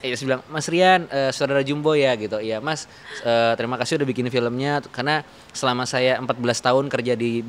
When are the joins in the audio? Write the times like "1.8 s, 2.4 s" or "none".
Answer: none